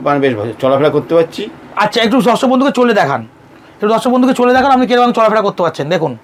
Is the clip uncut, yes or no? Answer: yes